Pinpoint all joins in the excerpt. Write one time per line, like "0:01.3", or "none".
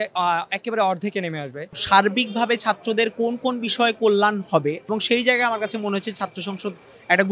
0:01.8
0:04.9